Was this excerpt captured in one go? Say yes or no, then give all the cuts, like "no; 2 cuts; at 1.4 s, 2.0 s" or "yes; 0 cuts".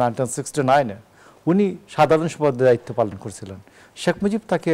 yes; 0 cuts